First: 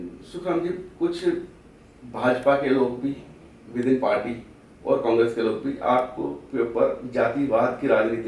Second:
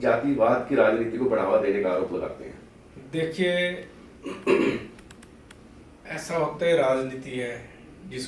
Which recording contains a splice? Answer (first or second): second